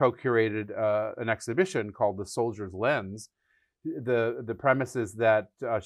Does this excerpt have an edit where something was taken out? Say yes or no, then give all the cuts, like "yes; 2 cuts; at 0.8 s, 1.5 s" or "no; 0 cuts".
no; 0 cuts